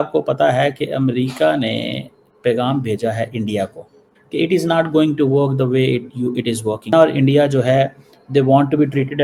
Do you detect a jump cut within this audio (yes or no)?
no